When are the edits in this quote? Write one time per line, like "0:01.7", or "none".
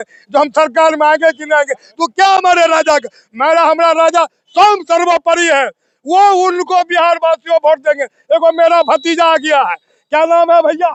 none